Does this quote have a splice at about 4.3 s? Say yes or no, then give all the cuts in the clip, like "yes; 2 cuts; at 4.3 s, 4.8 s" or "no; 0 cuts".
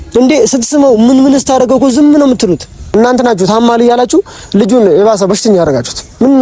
no; 1 cut; at 2.8 s